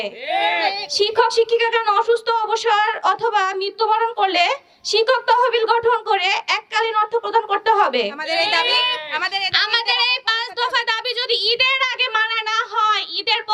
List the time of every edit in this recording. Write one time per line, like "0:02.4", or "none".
none